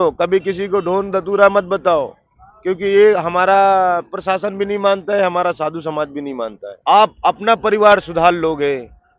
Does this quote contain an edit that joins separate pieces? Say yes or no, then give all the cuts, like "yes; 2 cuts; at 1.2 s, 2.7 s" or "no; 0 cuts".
yes; 1 cut; at 6.6 s